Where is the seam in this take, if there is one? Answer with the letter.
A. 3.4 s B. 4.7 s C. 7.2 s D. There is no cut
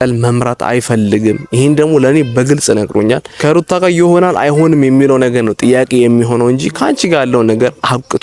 A